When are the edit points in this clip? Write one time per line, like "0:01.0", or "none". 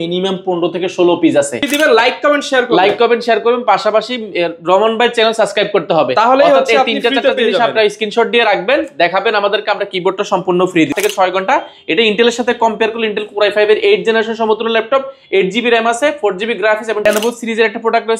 0:01.6
0:10.9
0:17.1